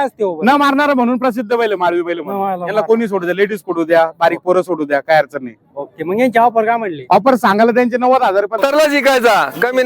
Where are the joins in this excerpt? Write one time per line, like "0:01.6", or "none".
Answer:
0:08.6